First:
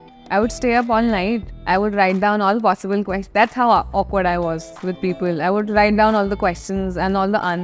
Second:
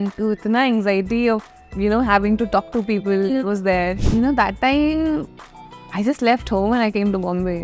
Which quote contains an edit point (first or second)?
second